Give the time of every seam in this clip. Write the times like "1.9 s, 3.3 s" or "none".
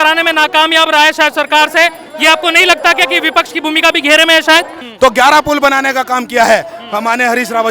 4.8 s

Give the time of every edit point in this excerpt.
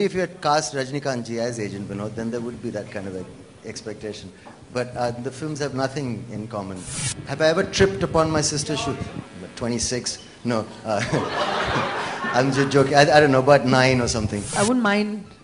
7.0 s, 14.4 s

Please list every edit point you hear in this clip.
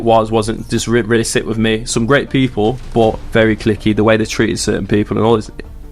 3.2 s

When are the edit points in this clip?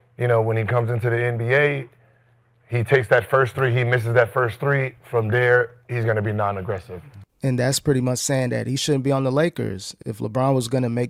none

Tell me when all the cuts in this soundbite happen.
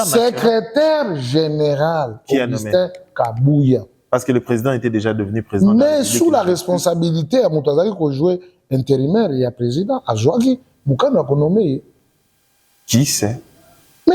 none

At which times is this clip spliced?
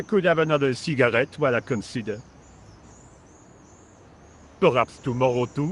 2.2 s, 4.6 s

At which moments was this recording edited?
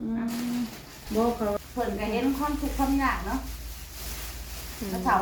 1.6 s

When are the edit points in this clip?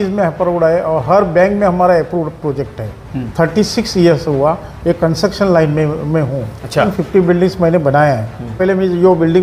3.2 s, 6.9 s, 8.6 s

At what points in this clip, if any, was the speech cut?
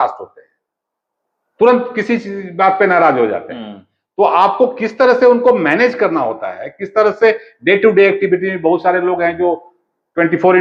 none

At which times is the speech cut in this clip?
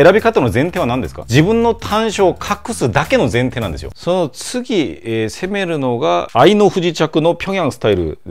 3.9 s

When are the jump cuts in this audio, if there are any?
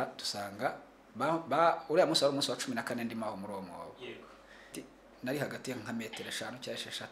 4.7 s

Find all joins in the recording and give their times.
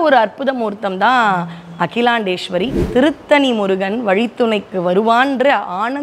2.8 s

